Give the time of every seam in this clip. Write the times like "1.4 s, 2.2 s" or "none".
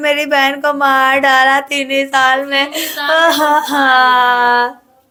none